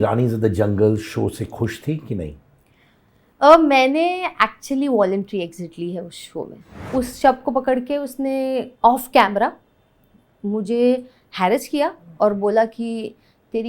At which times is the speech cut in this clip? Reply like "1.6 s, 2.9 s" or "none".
6.9 s